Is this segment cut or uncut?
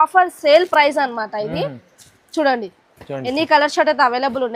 uncut